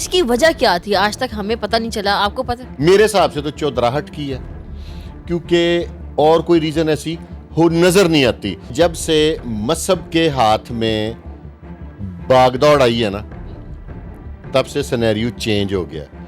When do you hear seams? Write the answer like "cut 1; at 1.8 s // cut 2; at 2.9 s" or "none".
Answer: cut 1; at 2.7 s // cut 2; at 8.7 s